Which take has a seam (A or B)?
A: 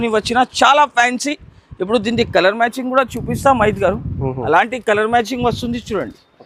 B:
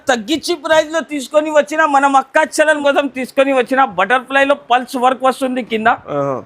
B